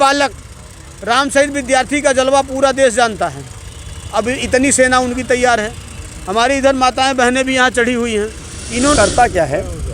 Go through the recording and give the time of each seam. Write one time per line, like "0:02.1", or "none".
0:09.0